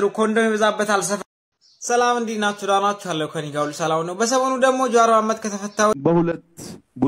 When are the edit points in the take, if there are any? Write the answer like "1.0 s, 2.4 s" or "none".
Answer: 1.2 s, 6.0 s